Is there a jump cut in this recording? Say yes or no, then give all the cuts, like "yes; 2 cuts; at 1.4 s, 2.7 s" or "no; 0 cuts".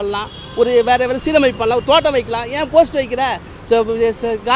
no; 0 cuts